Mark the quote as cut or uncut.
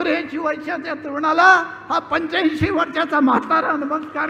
uncut